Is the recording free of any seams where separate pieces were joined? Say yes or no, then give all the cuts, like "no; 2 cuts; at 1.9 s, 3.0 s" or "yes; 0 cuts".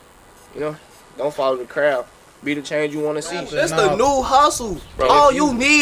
no; 1 cut; at 3.5 s